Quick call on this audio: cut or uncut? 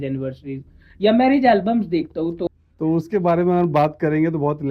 cut